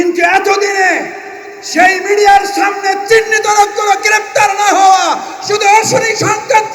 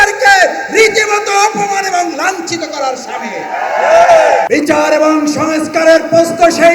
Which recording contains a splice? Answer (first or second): second